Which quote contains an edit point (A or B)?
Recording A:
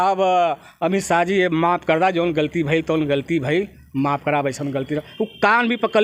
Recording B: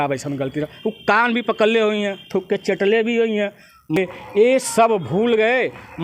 B